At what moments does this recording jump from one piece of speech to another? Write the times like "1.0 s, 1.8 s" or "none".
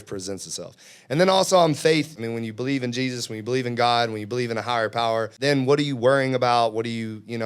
2.1 s, 5.3 s